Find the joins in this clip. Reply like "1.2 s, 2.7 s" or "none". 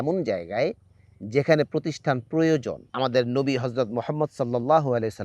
2.8 s